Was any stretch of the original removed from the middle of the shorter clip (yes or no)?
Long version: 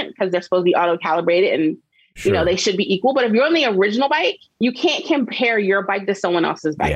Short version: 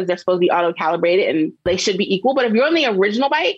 yes